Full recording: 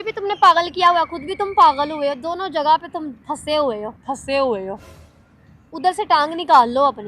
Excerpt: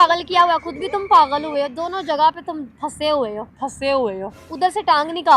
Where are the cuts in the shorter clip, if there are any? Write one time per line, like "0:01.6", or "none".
0:04.4